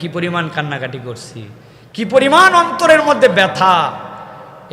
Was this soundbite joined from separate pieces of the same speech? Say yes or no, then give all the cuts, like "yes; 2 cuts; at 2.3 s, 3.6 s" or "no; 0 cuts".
no; 0 cuts